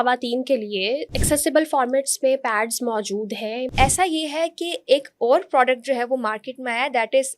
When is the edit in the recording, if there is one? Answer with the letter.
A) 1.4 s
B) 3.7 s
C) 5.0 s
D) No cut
B